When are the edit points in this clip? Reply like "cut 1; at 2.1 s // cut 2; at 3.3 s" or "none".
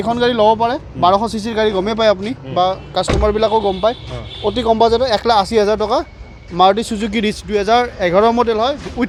none